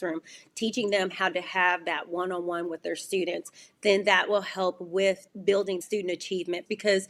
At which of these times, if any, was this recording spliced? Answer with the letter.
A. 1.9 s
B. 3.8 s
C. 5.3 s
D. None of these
D